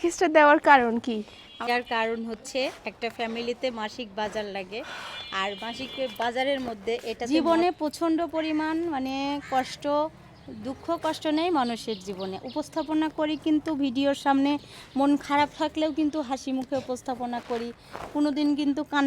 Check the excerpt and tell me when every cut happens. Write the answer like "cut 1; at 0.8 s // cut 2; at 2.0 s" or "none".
cut 1; at 1.7 s // cut 2; at 7.2 s